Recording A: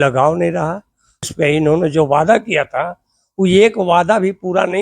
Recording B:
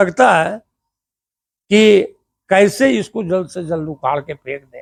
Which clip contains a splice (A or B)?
A